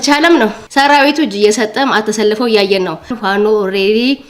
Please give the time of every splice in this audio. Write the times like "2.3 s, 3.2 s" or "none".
none